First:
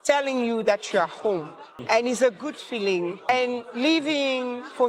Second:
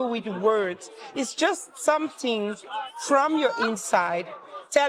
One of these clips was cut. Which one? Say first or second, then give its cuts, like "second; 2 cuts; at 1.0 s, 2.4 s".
first; 2 cuts; at 1.8 s, 3.3 s